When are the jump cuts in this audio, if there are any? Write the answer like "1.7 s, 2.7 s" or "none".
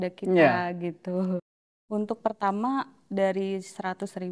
1.5 s